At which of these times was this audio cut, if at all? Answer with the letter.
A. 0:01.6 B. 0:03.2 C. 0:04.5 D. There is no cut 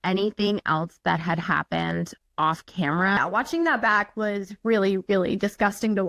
B